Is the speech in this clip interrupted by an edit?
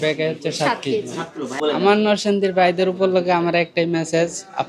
yes; 1 cut; at 1.5 s

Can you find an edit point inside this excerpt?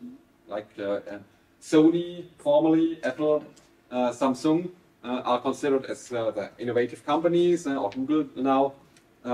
no; 0 cuts

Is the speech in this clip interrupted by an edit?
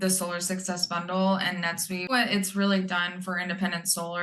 yes; 1 cut; at 2.1 s

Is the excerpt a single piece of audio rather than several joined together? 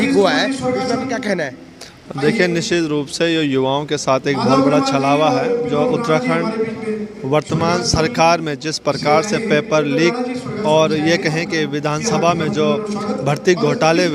yes; 0 cuts

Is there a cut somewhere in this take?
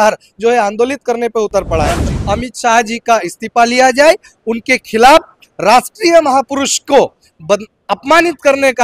yes; 1 cut; at 2.1 s

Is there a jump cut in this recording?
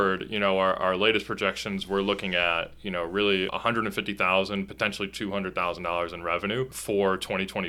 no; 0 cuts

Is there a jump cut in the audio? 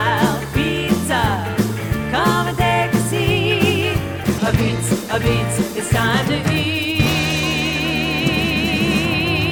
no; 0 cuts

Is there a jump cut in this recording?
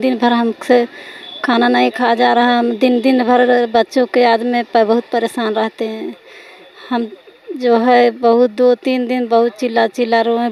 no; 0 cuts

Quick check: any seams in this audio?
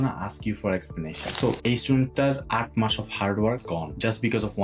yes; 1 cut; at 1.2 s

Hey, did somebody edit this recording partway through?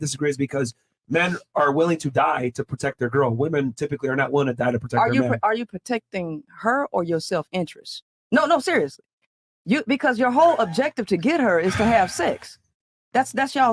no; 0 cuts

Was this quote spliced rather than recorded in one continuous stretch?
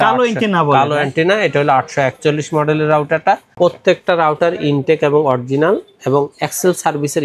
yes; 1 cut; at 3.5 s

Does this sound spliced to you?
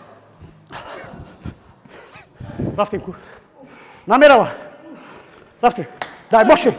no; 0 cuts

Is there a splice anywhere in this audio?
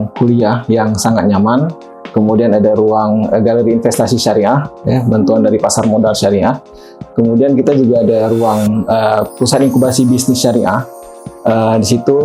yes; 1 cut; at 1.9 s

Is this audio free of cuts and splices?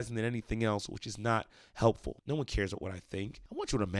no; 1 cut; at 2.2 s

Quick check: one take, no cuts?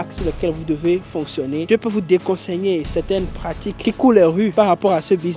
no; 1 cut; at 1.7 s

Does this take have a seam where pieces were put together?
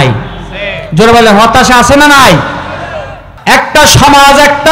yes; 1 cut; at 3.3 s

